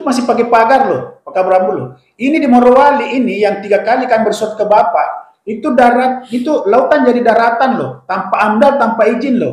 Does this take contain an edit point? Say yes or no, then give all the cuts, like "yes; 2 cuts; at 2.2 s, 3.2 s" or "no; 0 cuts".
no; 0 cuts